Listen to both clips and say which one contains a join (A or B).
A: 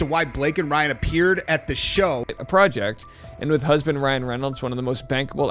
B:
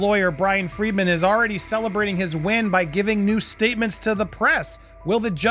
A